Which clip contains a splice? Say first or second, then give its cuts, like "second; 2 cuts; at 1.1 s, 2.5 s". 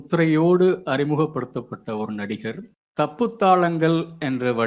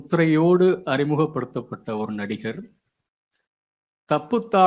first; 1 cut; at 2.8 s